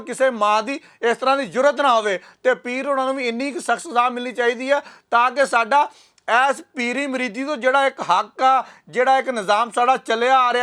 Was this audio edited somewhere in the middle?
no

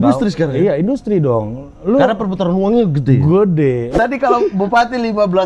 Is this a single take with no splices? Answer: no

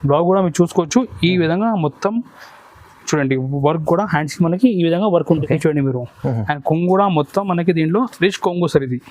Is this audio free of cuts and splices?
no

